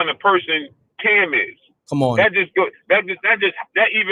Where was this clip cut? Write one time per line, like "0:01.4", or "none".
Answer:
none